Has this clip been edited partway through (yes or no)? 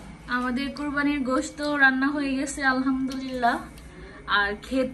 no